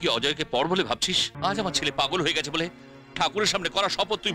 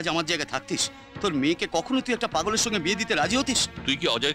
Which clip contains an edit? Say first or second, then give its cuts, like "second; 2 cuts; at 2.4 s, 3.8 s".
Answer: first; 1 cut; at 1.3 s